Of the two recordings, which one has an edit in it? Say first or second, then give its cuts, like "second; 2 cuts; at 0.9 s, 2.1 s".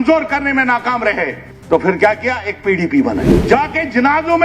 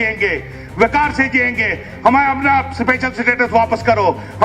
first; 2 cuts; at 1.5 s, 3.3 s